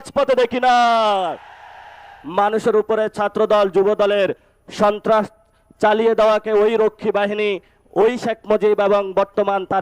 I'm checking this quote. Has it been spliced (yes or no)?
yes